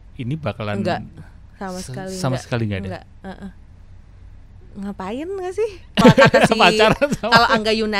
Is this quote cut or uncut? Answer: cut